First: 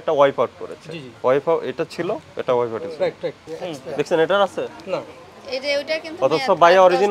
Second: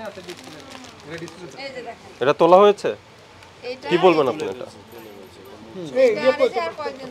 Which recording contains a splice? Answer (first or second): first